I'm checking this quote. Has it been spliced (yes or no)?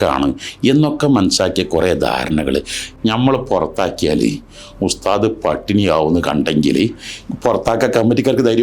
yes